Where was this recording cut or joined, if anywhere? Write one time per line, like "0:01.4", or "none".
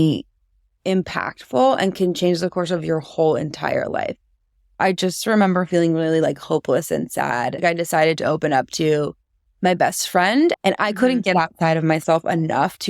0:04.7
0:07.6
0:10.6